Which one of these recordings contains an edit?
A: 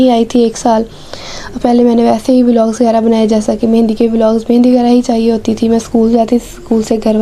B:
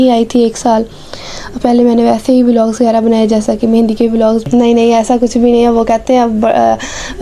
B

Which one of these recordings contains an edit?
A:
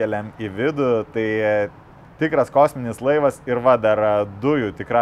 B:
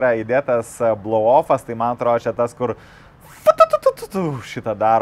A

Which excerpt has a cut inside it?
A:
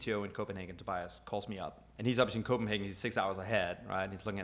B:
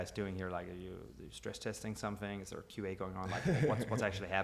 A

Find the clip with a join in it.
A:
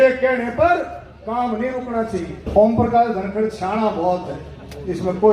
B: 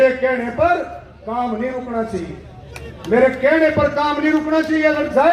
A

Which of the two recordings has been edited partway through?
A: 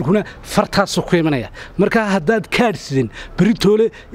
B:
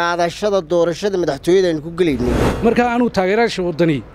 B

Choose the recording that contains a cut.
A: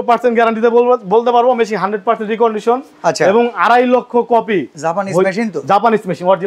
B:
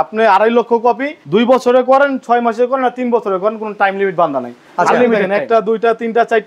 B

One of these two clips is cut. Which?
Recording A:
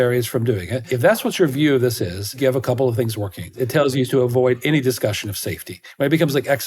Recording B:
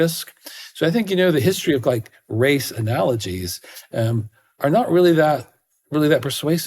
A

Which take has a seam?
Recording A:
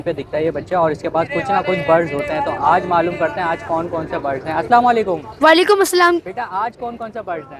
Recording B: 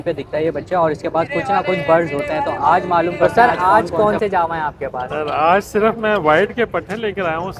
B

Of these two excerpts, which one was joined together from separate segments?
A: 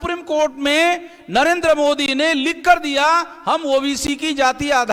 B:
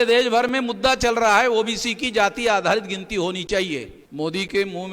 B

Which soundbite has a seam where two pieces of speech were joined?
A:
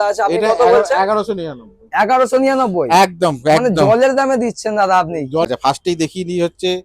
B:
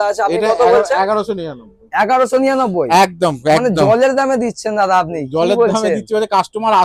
A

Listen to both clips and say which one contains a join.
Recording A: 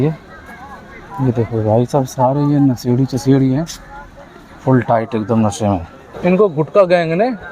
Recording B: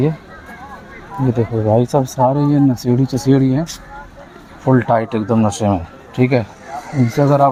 A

